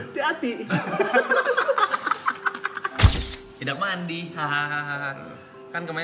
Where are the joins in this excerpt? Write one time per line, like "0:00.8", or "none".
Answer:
0:03.1